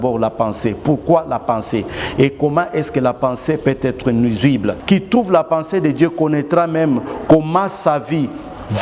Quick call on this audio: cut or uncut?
cut